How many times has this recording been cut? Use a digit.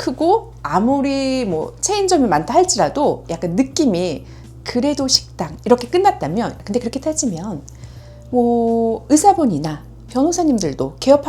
1